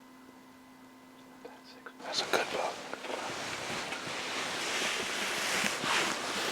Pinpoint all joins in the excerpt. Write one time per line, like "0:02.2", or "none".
0:04.6